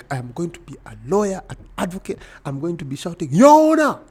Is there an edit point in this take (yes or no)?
no